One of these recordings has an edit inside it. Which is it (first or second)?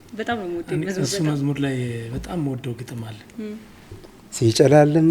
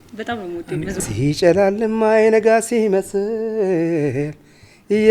second